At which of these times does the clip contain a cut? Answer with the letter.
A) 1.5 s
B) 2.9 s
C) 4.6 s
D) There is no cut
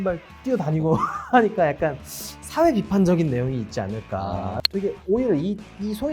C